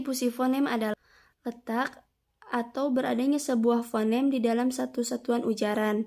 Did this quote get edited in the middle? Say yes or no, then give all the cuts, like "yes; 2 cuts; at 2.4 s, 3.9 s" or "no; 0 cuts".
yes; 1 cut; at 0.9 s